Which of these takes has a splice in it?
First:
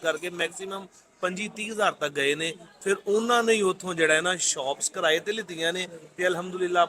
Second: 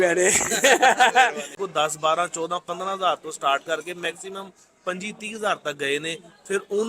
second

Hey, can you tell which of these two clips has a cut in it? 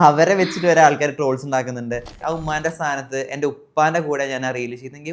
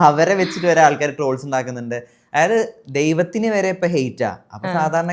first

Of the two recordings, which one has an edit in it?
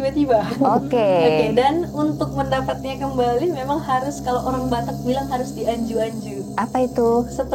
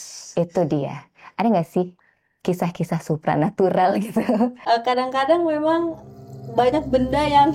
second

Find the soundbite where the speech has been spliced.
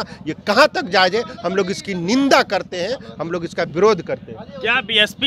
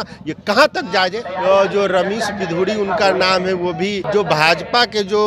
second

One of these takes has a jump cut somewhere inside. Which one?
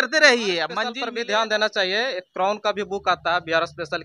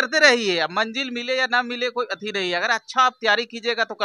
first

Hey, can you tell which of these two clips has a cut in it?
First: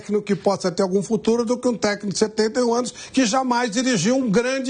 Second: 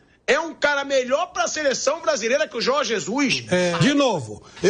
second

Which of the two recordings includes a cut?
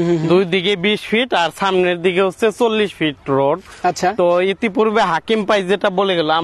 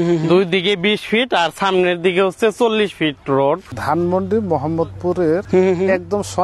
second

